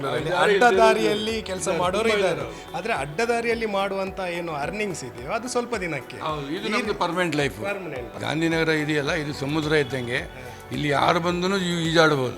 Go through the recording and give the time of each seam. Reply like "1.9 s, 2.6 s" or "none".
8.2 s